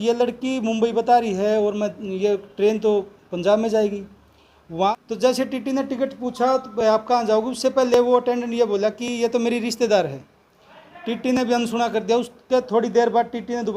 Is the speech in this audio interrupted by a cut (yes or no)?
yes